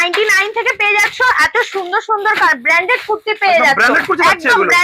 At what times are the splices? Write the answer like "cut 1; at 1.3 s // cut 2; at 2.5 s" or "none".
none